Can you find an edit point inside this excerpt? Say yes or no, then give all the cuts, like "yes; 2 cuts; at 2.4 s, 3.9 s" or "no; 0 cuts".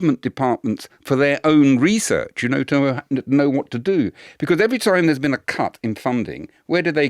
no; 0 cuts